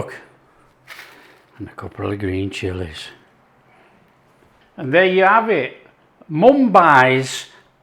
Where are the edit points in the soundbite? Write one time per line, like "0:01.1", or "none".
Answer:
0:01.4